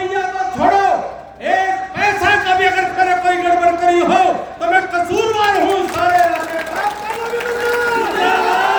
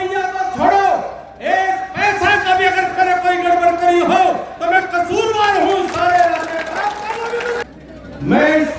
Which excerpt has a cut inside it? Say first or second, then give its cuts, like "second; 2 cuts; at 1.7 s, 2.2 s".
second; 1 cut; at 7.6 s